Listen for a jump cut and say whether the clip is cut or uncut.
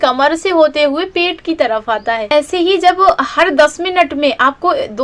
cut